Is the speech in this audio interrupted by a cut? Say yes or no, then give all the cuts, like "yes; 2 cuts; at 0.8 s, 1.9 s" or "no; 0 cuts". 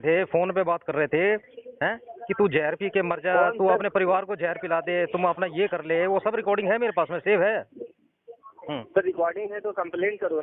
no; 0 cuts